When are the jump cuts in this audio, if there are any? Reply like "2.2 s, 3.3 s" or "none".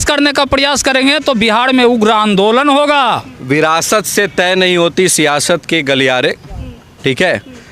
3.3 s